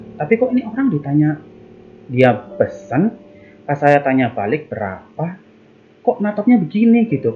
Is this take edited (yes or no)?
no